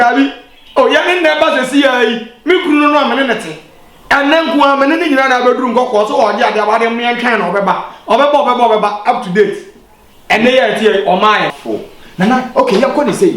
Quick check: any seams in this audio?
yes; 1 cut; at 11.5 s

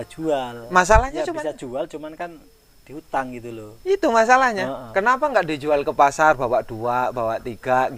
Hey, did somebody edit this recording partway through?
no; 0 cuts

